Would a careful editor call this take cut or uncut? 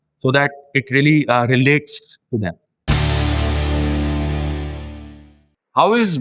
cut